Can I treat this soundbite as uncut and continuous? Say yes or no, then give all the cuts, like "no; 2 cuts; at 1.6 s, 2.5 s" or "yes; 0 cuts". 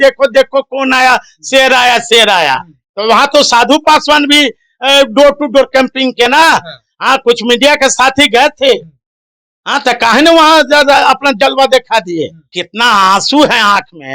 no; 1 cut; at 12.6 s